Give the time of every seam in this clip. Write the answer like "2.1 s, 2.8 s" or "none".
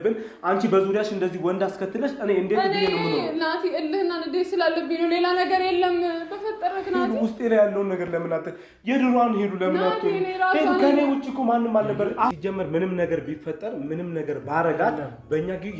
12.3 s